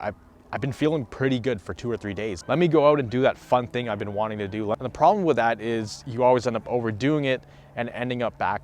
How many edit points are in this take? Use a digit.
2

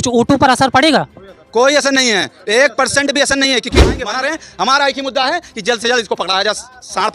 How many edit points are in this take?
1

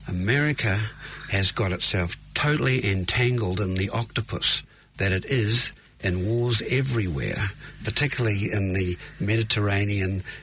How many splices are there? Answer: 0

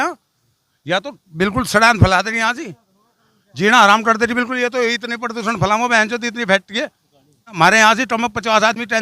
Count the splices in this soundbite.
1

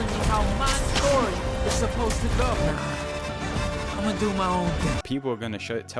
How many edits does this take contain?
2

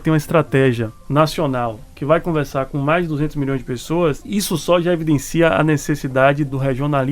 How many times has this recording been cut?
2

